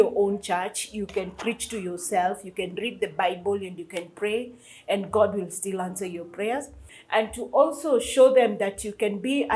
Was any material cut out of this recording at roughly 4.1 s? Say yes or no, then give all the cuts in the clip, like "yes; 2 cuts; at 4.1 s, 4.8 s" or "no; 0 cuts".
no; 1 cut; at 6.9 s